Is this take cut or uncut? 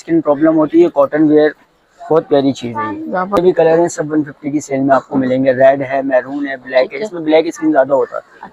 cut